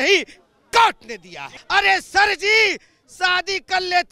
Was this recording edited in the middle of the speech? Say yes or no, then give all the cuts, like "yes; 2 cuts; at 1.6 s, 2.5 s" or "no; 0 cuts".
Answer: yes; 1 cut; at 1.6 s